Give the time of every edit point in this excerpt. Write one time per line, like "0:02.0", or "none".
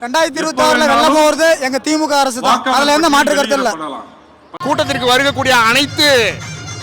0:04.5